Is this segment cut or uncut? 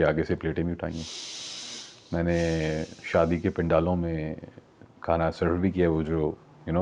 uncut